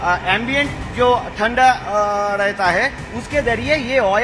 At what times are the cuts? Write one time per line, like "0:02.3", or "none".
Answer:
none